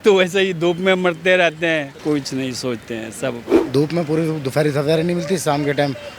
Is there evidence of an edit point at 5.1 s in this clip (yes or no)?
no